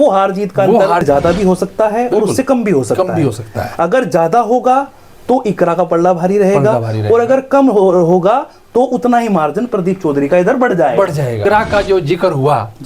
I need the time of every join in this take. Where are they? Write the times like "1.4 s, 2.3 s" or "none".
1.0 s, 11.4 s